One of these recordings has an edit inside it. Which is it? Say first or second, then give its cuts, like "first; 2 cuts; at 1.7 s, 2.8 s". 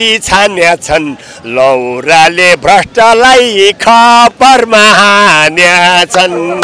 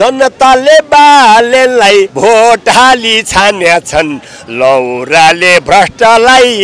second; 1 cut; at 2.1 s